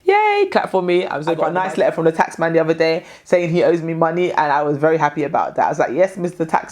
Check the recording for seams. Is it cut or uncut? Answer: cut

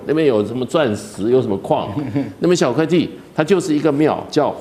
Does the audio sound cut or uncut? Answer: uncut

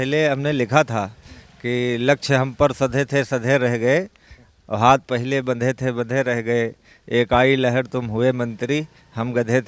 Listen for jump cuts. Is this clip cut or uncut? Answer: uncut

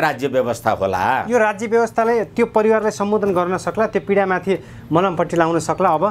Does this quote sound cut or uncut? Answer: uncut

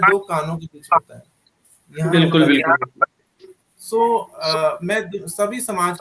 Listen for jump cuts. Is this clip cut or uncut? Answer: uncut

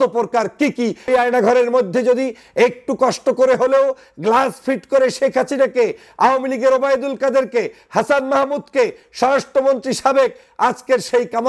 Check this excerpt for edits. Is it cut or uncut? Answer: cut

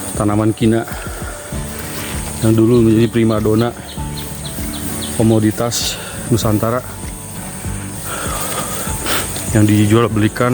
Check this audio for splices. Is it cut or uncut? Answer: uncut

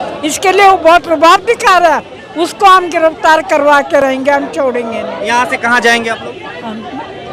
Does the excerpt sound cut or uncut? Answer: uncut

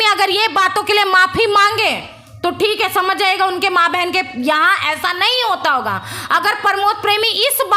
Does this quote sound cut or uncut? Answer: uncut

